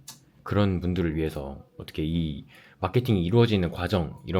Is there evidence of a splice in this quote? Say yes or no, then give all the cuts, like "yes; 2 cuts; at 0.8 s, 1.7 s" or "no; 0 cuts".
no; 0 cuts